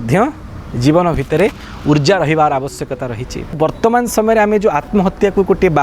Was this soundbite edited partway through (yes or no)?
yes